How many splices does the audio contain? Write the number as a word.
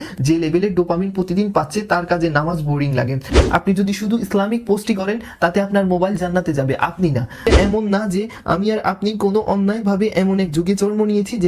two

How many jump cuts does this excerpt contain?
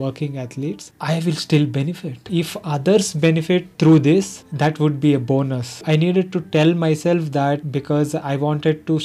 four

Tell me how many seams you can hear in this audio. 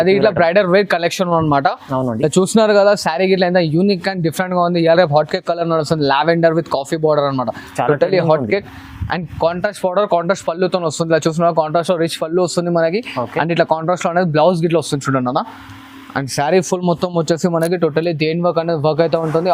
zero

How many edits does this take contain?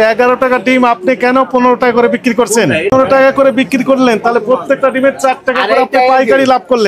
one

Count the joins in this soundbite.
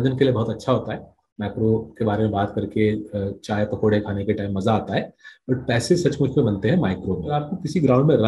one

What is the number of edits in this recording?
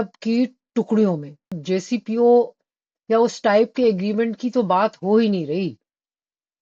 one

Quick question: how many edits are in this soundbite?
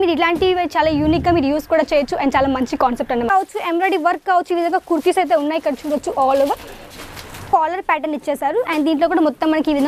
two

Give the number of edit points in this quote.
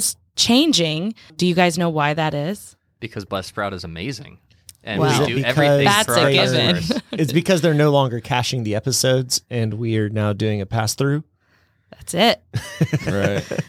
one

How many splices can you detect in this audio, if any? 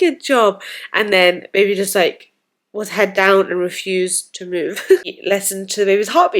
one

